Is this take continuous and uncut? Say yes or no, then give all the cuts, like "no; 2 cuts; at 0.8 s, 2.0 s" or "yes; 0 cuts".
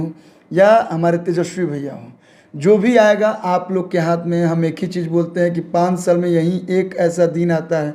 yes; 0 cuts